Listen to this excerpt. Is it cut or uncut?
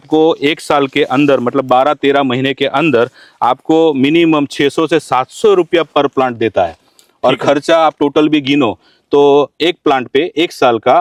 uncut